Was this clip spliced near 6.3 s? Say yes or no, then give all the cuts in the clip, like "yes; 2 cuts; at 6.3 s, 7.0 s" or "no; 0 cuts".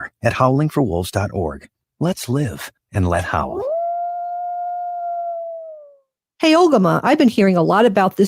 yes; 1 cut; at 6.3 s